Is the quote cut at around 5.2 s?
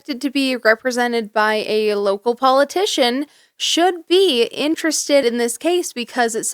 yes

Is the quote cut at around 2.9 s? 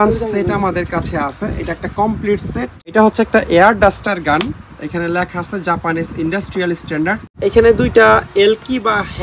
yes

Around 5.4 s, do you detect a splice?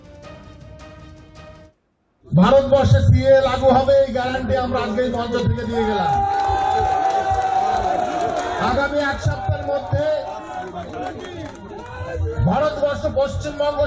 no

